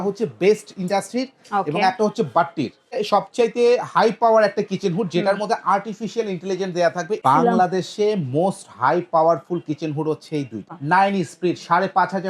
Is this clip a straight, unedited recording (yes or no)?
no